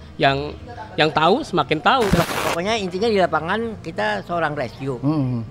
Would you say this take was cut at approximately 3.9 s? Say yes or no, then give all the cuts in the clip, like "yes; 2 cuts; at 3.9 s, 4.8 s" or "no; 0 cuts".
no; 1 cut; at 2.2 s